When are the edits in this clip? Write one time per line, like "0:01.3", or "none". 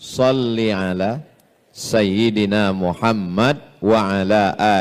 none